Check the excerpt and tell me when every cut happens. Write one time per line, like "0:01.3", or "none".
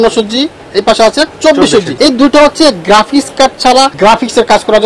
0:01.9
0:03.9